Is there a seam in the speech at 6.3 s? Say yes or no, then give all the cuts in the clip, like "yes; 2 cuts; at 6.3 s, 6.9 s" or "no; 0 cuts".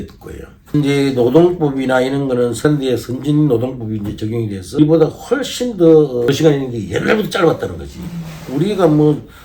yes; 4 cuts; at 0.7 s, 2.6 s, 4.8 s, 6.3 s